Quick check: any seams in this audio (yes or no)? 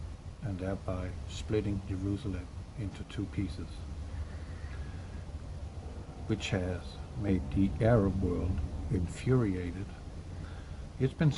no